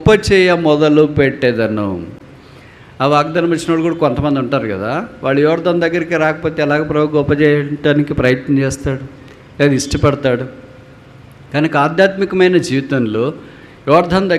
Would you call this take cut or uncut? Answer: uncut